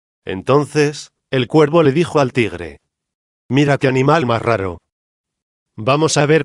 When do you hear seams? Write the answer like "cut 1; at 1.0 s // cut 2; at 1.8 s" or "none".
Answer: cut 1; at 5.2 s